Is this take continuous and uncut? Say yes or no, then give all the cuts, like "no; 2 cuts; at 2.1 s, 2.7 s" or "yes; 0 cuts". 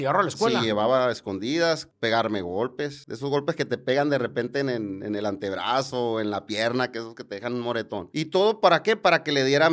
no; 3 cuts; at 1.9 s, 3.0 s, 8.1 s